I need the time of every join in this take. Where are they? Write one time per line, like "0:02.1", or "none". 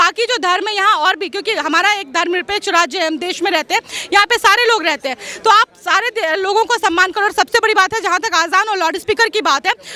none